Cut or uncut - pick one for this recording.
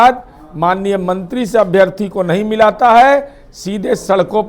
uncut